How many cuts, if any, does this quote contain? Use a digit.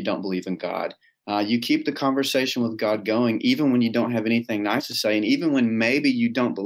0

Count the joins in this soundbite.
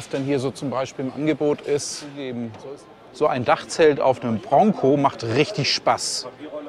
1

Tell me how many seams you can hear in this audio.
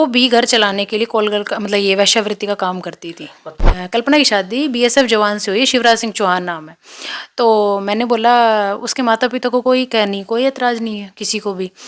1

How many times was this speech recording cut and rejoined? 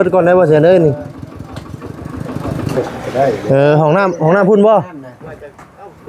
1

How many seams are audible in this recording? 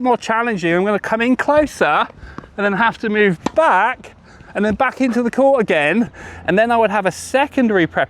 1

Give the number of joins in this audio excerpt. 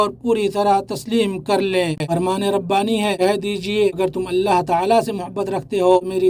1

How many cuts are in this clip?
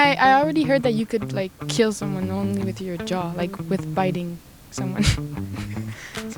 0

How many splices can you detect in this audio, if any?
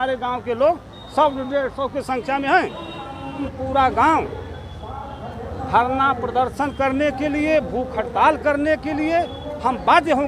1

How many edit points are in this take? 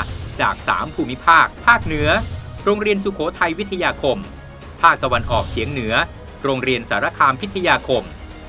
1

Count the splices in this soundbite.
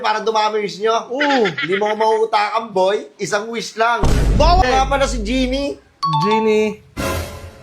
1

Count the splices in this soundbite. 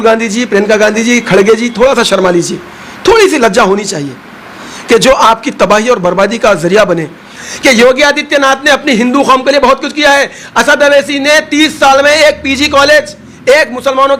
1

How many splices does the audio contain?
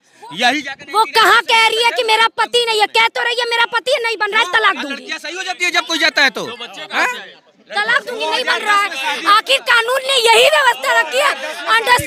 0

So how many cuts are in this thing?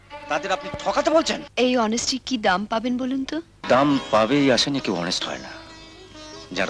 2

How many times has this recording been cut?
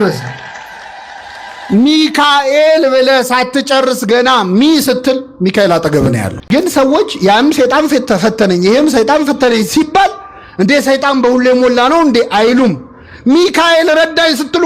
1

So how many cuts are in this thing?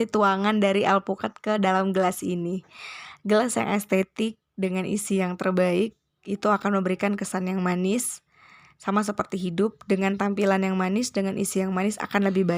0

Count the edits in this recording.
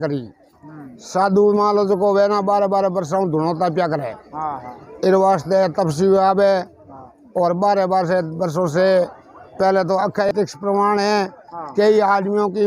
1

